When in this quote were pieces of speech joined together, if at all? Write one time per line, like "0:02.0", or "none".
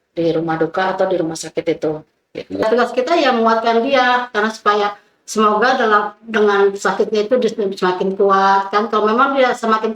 0:02.6